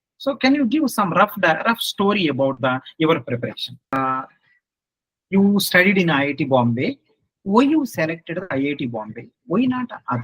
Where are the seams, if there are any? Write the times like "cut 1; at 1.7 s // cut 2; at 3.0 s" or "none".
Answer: cut 1; at 4.0 s